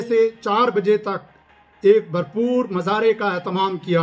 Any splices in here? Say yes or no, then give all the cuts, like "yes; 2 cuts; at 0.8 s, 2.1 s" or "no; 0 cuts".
no; 0 cuts